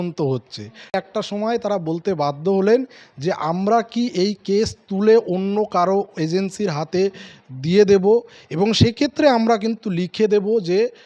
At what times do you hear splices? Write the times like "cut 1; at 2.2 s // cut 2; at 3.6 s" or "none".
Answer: cut 1; at 0.9 s